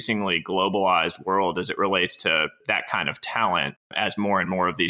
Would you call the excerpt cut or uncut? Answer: cut